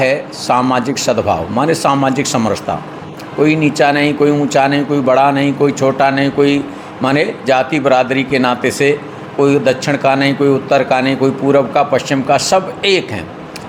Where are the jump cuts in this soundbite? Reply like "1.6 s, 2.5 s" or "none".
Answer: none